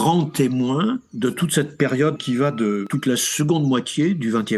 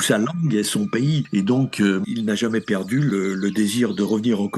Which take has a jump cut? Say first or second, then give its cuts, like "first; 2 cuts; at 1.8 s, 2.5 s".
second; 2 cuts; at 2.1 s, 3.1 s